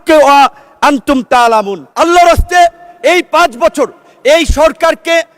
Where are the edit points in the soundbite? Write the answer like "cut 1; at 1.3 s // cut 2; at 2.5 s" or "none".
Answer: cut 1; at 1.8 s